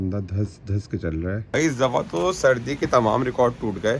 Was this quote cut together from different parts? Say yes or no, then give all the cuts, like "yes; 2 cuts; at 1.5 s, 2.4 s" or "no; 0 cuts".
yes; 1 cut; at 1.5 s